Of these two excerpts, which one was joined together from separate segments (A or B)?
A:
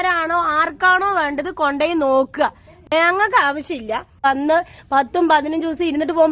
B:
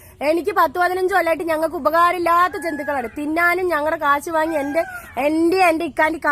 A